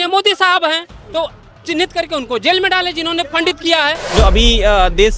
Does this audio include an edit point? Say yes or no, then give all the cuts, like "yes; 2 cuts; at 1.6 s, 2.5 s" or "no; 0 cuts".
yes; 1 cut; at 4.0 s